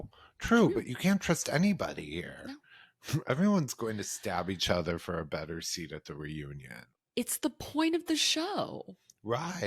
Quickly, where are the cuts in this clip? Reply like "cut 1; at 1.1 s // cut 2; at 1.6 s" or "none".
none